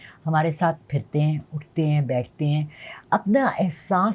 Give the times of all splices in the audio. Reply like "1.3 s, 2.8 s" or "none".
none